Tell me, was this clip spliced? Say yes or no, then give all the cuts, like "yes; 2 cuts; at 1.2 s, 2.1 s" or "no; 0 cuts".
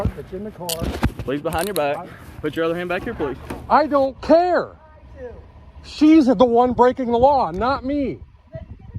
yes; 1 cut; at 3.5 s